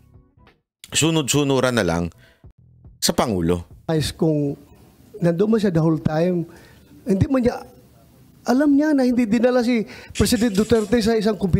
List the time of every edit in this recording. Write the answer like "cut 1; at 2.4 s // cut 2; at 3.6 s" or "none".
cut 1; at 3.9 s